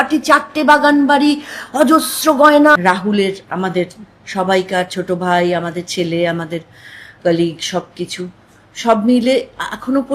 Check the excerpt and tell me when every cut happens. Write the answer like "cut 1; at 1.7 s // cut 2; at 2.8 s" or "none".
cut 1; at 2.8 s